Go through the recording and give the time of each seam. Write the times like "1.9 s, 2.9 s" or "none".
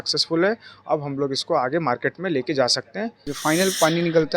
3.2 s